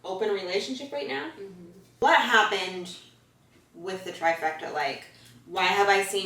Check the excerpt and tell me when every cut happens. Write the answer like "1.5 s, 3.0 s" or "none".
1.9 s